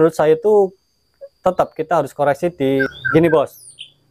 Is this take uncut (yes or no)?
no